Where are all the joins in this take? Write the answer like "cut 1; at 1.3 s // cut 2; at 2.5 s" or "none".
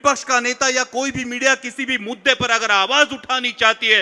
none